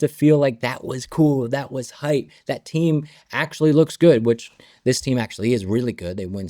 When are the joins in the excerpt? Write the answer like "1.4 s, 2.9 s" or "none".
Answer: none